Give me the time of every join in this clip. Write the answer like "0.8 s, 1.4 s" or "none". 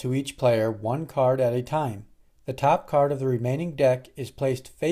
none

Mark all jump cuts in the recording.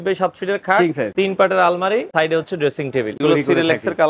1.1 s, 2.1 s, 3.2 s

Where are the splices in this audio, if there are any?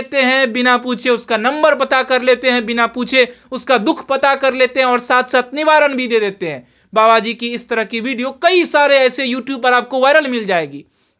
none

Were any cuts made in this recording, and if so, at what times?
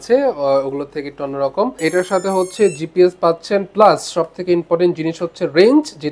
1.8 s

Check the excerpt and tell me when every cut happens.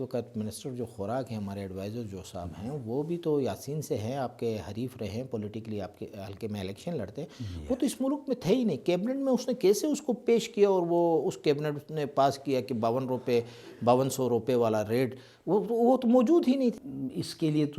16.9 s

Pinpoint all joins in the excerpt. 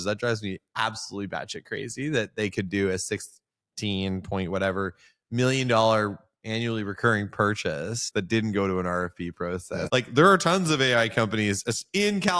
8.0 s, 9.8 s

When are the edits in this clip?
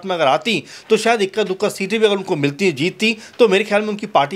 none

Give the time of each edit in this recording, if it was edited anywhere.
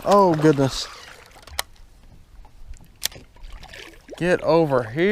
none

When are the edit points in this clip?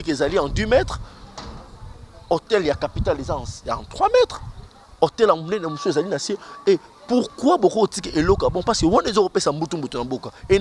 none

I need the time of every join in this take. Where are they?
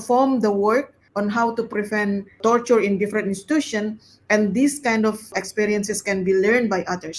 1.0 s, 2.4 s, 5.3 s

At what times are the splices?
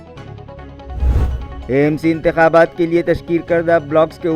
1.2 s

